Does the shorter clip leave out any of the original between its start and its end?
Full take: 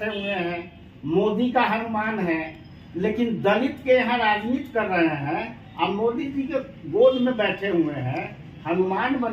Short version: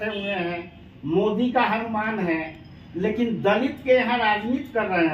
no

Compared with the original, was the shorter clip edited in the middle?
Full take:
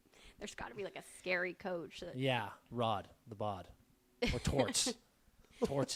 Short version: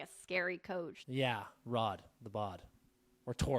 yes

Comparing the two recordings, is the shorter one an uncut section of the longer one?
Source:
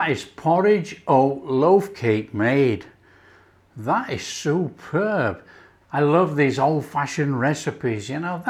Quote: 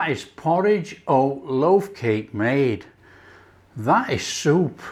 yes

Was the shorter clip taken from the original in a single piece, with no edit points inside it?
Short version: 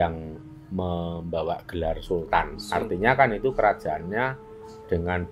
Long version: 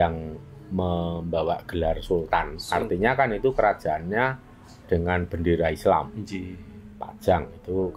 yes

